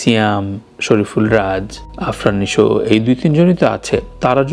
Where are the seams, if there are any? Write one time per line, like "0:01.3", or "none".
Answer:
none